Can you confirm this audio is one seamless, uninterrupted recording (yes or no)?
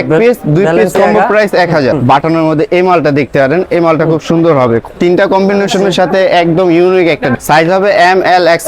no